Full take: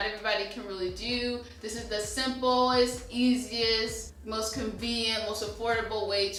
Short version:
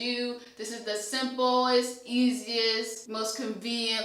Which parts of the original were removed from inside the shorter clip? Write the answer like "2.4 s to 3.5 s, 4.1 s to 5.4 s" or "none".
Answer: 4.0 s to 4.2 s